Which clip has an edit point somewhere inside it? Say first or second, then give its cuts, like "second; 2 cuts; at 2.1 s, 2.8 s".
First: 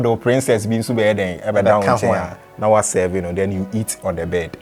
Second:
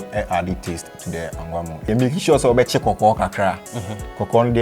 second; 1 cut; at 1.8 s